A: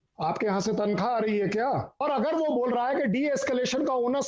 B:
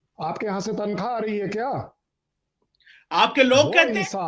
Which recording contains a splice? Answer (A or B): A